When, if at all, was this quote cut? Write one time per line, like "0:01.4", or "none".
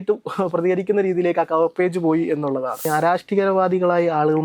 0:02.9